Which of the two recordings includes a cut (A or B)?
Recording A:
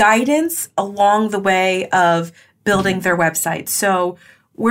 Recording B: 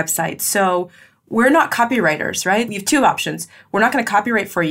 B